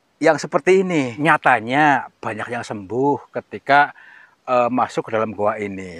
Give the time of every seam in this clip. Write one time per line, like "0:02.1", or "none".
0:01.1